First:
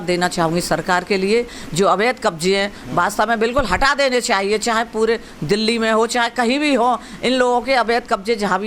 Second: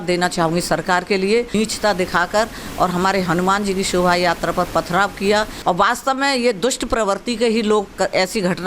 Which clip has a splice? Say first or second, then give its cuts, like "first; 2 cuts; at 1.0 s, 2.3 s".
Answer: second; 2 cuts; at 1.5 s, 5.5 s